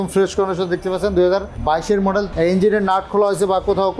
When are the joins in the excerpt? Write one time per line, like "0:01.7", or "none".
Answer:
0:01.9